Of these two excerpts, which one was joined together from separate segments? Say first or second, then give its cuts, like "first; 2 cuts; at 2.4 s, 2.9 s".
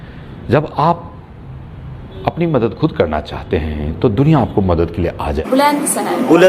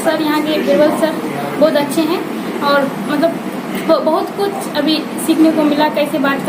first; 1 cut; at 5.4 s